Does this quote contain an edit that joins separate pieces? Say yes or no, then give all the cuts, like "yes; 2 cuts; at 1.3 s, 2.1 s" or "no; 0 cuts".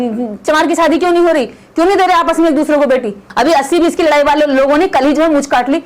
yes; 1 cut; at 3.2 s